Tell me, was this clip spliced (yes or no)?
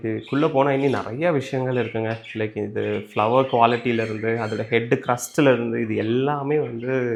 no